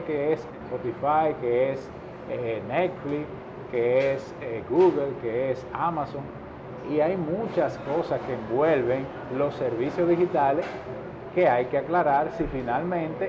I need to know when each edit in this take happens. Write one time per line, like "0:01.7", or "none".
none

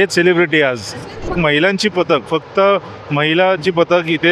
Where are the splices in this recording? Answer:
0:01.3

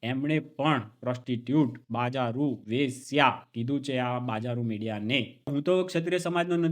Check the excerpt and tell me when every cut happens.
0:05.5

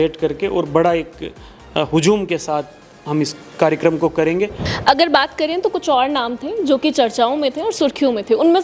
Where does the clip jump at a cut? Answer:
0:04.7

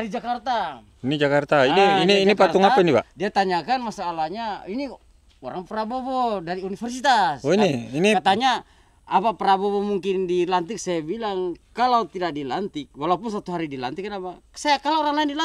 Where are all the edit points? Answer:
none

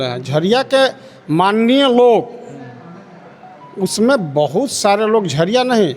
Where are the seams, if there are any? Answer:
none

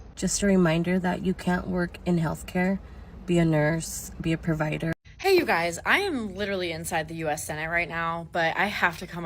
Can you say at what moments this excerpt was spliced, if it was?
0:04.9

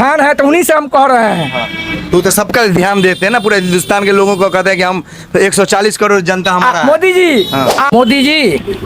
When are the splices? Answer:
0:07.9

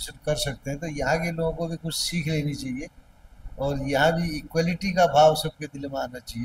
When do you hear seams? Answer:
none

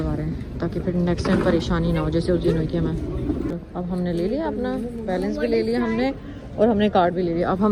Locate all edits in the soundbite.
none

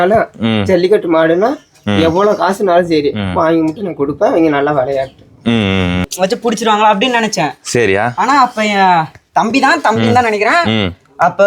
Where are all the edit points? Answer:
0:06.1

